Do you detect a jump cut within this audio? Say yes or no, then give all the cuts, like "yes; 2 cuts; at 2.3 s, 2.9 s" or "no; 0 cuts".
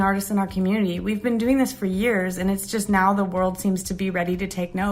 no; 0 cuts